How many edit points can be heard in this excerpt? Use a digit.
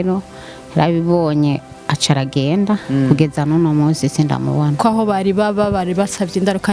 1